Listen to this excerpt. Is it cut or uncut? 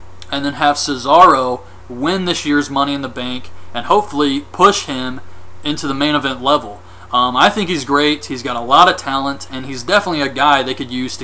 cut